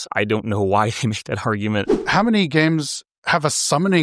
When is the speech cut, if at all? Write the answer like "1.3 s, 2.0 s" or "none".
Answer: 2.0 s